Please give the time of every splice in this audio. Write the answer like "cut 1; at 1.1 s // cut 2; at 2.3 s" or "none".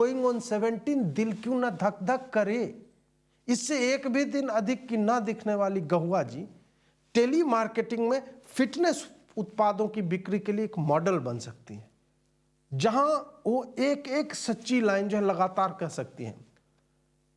none